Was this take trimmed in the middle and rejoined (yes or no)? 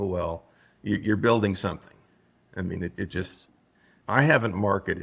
no